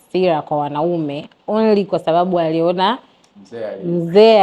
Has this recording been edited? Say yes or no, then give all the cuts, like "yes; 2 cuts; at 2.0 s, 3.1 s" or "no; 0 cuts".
no; 0 cuts